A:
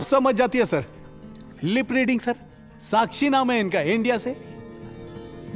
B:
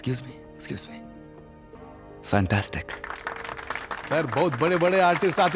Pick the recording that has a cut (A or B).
B